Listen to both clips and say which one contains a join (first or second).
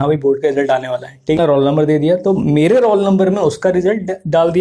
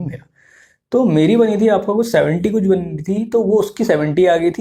first